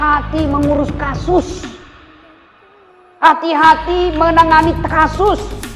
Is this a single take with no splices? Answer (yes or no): yes